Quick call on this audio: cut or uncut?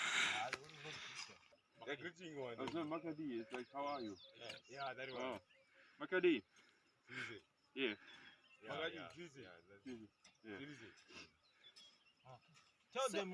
cut